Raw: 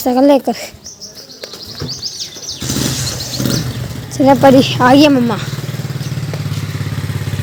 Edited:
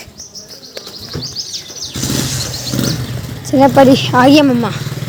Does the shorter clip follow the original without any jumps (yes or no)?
yes